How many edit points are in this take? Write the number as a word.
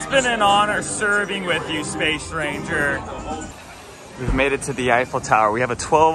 one